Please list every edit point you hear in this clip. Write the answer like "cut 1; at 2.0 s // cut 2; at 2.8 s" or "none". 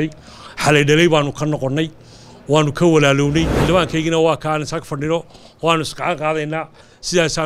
cut 1; at 3.5 s